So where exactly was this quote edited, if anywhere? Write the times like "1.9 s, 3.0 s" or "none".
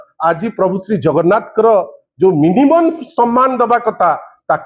none